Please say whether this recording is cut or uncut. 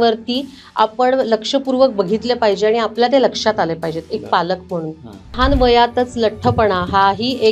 cut